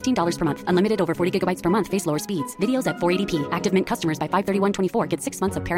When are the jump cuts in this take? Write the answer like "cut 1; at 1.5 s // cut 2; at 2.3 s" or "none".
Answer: none